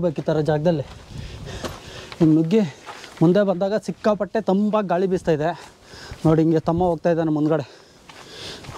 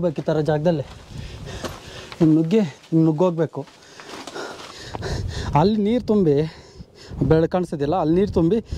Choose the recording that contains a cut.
second; 2 cuts; at 2.8 s, 4.6 s

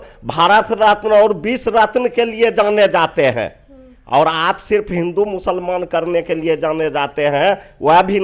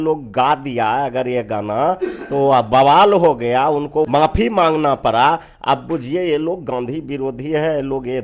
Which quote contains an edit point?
second; 1 cut; at 4.1 s

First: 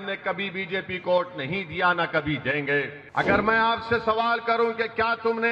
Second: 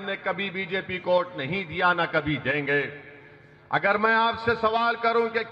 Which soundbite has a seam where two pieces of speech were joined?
first; 1 cut; at 3.0 s

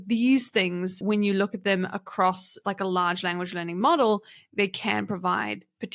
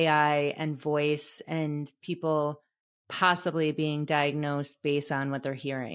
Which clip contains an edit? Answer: first; 1 cut; at 1.0 s

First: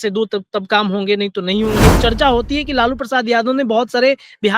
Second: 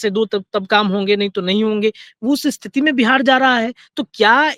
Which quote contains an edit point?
first; 1 cut; at 2.0 s

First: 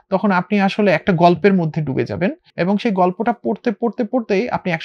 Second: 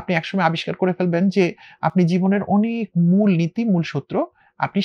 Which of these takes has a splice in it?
first; 1 cut; at 2.5 s

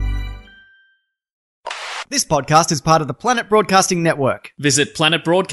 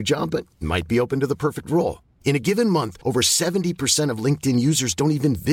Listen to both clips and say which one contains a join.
first; 1 cut; at 1.5 s

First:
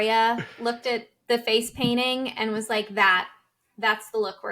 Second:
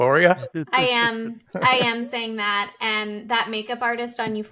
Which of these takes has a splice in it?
first; 1 cut; at 1.0 s

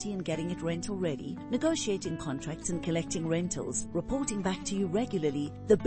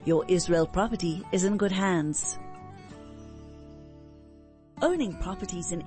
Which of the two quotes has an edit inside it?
second; 2 cuts; at 2.2 s, 4.6 s

